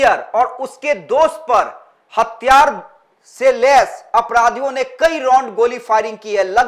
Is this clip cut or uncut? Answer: uncut